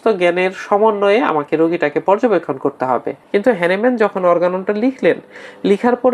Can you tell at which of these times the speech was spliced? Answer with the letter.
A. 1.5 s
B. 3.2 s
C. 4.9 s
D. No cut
B